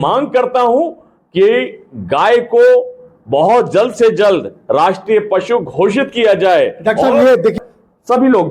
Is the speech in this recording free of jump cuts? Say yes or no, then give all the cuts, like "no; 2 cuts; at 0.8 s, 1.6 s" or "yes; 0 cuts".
no; 1 cut; at 7.6 s